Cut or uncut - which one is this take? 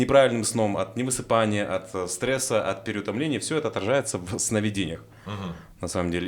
uncut